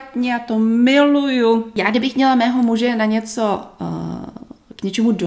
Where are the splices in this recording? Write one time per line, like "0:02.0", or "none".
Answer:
0:01.7